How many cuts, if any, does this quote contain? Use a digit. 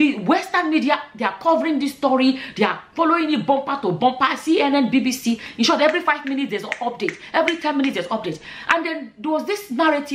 0